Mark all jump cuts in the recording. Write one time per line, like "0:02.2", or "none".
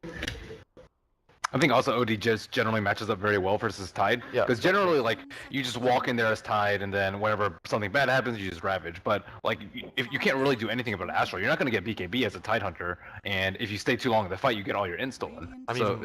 0:02.2